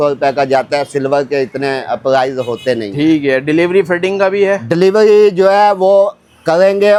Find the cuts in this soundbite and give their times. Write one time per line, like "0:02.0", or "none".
none